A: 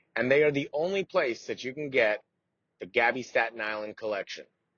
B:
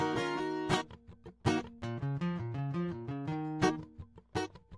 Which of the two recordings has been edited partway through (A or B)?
B